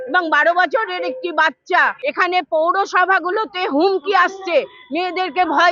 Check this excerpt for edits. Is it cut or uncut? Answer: cut